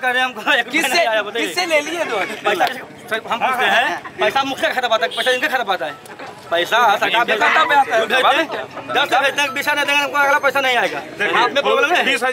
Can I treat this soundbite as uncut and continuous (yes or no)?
yes